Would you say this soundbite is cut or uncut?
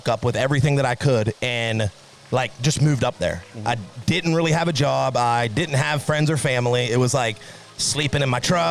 uncut